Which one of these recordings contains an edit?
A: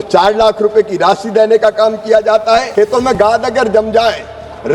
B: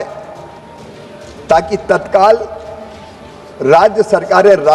A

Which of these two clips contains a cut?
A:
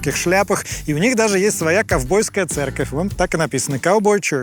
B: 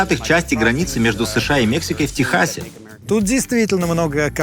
B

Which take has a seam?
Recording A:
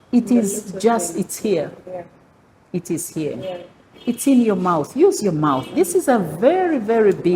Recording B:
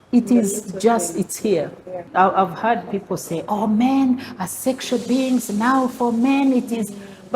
B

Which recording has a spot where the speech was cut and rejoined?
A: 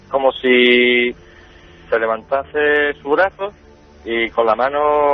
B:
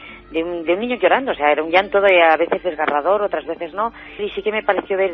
B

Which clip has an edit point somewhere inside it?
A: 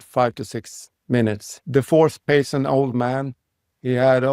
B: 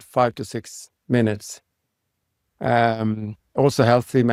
A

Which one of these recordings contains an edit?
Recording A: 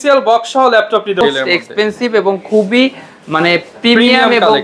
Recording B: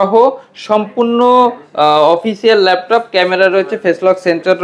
A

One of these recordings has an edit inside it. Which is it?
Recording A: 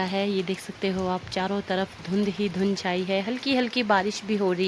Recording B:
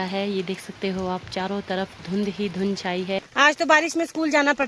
B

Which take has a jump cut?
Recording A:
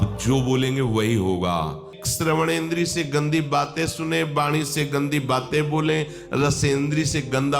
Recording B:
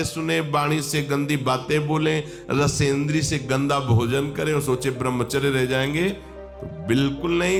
A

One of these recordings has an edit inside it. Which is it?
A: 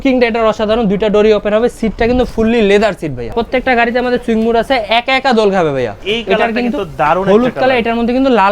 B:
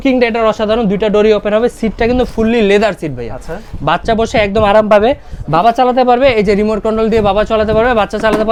A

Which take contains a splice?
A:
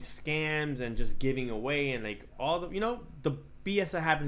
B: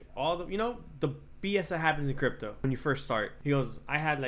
B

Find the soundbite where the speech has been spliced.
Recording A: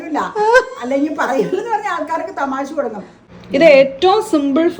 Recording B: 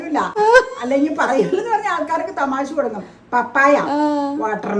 A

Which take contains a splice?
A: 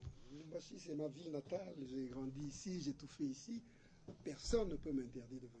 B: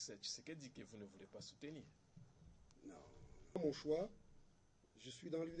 B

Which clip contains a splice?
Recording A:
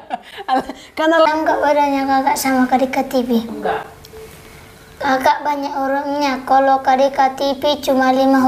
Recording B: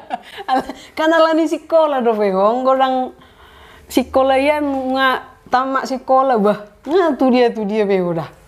A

